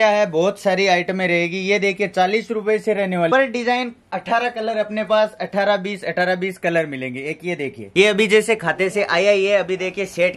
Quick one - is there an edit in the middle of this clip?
yes; 2 cuts; at 3.3 s, 7.8 s

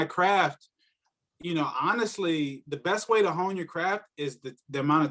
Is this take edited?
no; 0 cuts

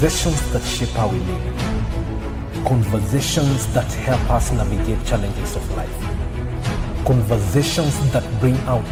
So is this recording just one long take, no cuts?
yes; 0 cuts

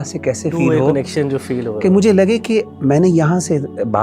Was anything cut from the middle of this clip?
no; 0 cuts

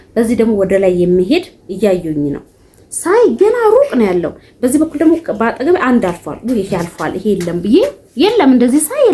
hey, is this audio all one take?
yes; 0 cuts

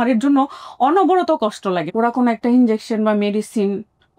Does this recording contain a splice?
yes; 1 cut; at 1.8 s

